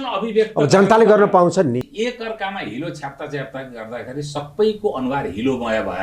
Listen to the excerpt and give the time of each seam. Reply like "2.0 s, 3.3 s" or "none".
1.8 s